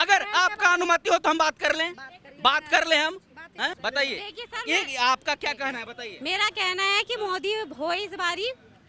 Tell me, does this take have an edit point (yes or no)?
yes